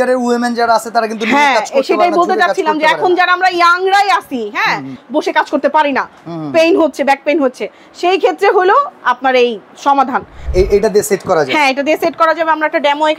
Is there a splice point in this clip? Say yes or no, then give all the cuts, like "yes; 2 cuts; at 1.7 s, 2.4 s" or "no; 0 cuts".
yes; 2 cuts; at 4.9 s, 10.5 s